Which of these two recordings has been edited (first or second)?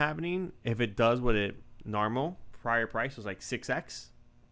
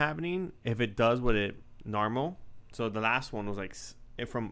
first